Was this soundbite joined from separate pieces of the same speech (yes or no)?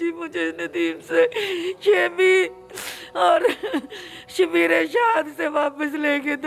no